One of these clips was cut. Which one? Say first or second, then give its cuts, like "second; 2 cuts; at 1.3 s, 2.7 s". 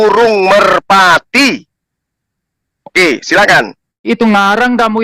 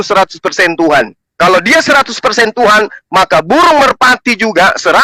first; 1 cut; at 4.1 s